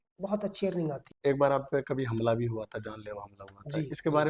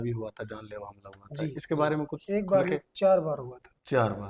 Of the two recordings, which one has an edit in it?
first; 1 cut; at 1.2 s

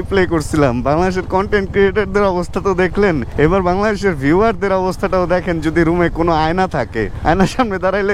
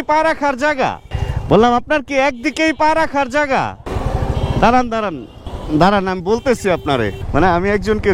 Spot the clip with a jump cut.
second; 2 cuts; at 3.9 s, 7.2 s

